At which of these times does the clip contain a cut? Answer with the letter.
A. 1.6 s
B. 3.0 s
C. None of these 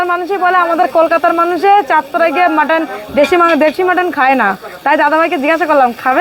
C